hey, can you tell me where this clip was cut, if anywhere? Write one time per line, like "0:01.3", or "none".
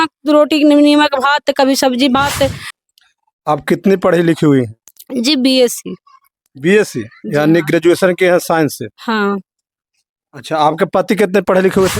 0:02.7